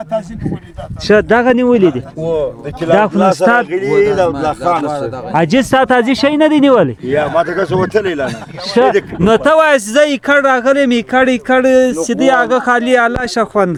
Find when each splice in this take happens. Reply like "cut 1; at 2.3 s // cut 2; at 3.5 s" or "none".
none